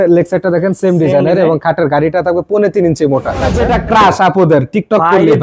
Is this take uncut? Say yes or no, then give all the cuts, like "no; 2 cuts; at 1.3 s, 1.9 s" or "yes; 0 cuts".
no; 1 cut; at 3.5 s